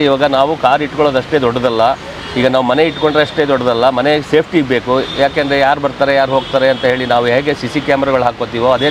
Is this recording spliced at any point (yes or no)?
no